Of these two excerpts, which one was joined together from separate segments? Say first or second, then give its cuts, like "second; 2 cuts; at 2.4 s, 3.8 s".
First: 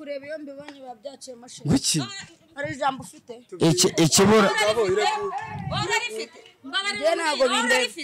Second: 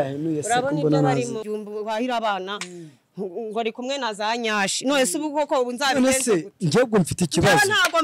second; 1 cut; at 1.4 s